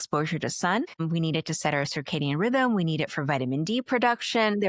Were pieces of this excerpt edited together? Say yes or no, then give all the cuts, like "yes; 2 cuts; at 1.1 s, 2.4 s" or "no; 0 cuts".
yes; 1 cut; at 0.9 s